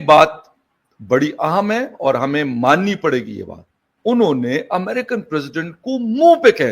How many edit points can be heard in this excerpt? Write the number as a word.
one